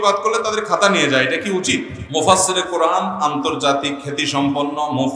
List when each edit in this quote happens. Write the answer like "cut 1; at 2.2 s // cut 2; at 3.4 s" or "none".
cut 1; at 2.0 s